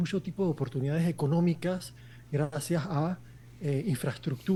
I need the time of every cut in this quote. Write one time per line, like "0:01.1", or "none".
none